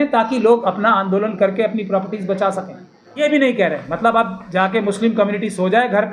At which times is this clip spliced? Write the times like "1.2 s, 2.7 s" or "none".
3.2 s